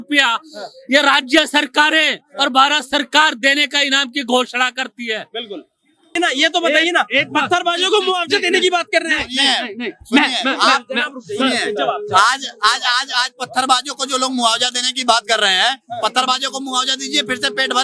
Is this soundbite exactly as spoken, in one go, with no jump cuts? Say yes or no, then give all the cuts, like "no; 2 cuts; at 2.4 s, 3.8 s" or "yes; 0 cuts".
no; 1 cut; at 6.1 s